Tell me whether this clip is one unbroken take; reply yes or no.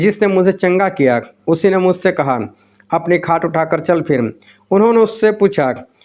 yes